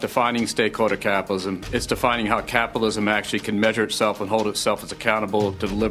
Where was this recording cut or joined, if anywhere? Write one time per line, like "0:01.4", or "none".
none